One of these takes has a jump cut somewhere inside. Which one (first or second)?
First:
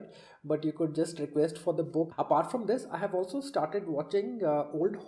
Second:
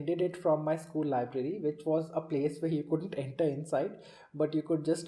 first